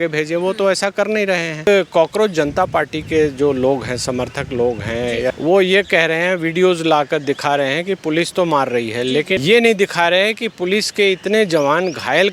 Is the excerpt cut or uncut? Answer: cut